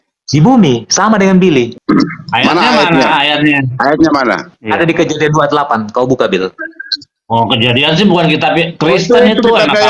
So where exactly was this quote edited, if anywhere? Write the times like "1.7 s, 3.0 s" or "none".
1.8 s, 4.5 s